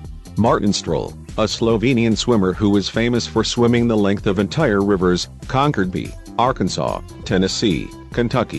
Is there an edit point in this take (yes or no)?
no